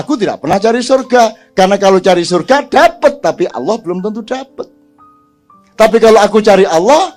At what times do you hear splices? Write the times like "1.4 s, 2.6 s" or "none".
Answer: none